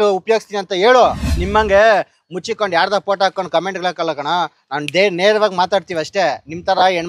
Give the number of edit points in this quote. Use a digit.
1